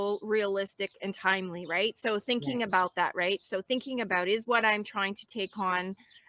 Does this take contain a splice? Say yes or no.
no